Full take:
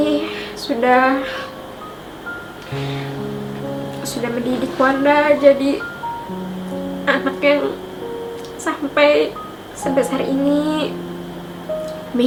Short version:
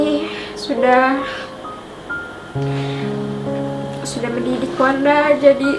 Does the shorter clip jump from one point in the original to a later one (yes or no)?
no